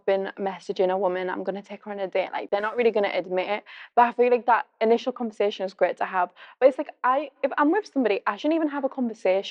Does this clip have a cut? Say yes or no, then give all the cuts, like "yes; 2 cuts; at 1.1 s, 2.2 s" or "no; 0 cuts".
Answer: no; 0 cuts